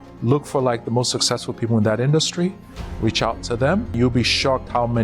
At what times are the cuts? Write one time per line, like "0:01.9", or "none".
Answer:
0:03.9